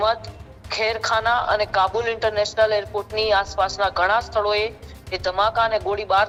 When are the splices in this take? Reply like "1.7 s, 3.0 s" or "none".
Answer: none